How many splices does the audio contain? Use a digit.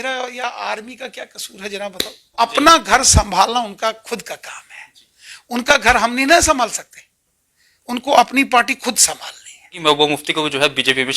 2